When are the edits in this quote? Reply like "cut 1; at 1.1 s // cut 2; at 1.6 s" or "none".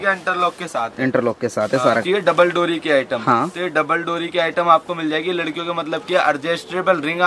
cut 1; at 1.8 s